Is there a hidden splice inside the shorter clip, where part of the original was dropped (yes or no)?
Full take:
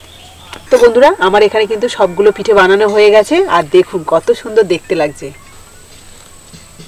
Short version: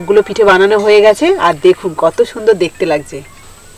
no